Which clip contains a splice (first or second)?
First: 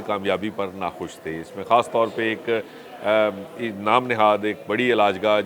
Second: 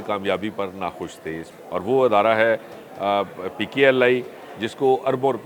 second